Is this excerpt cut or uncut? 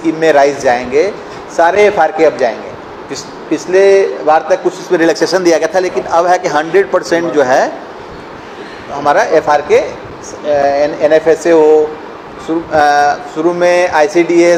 uncut